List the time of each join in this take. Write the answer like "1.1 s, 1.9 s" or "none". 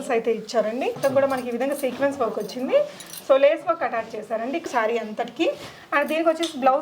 1.0 s, 4.6 s